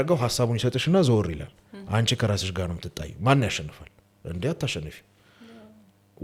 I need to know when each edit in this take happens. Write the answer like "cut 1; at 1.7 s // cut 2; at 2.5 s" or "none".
none